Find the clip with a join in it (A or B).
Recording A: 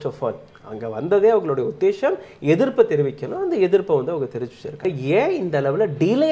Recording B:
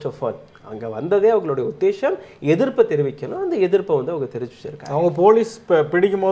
A